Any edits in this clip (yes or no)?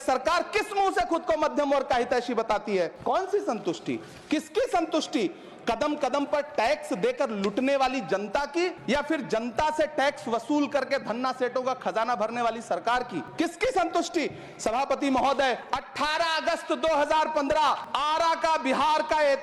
no